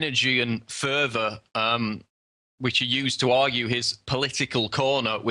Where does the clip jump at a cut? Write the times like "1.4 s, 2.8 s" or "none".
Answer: 3.7 s